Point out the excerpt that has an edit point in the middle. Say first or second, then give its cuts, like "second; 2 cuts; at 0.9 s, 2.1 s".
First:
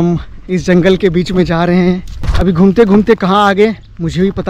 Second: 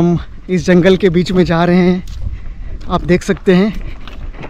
first; 1 cut; at 2.2 s